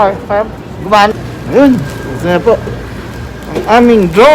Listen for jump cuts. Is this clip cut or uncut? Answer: cut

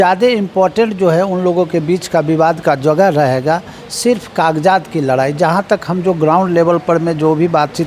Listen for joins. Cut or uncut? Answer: uncut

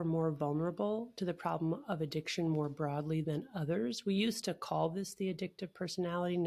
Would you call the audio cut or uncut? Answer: uncut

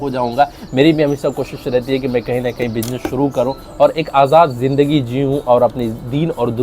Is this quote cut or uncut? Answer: uncut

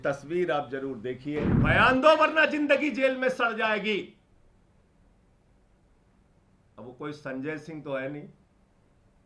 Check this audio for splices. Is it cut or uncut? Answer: cut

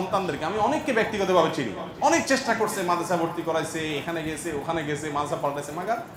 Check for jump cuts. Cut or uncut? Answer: uncut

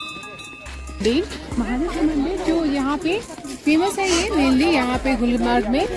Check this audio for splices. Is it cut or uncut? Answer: cut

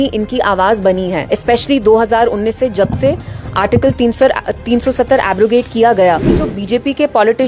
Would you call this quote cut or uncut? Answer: cut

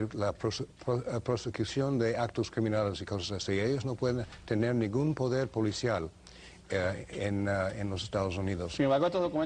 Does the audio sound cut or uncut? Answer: uncut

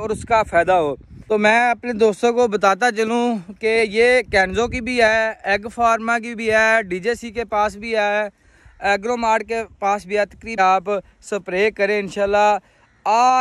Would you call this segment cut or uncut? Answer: cut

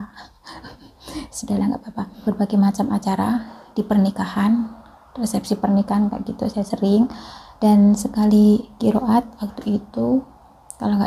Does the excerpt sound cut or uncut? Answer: cut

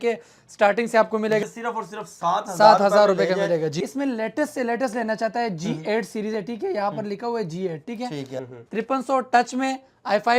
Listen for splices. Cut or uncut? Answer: cut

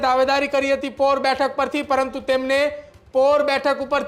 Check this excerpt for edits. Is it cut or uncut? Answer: uncut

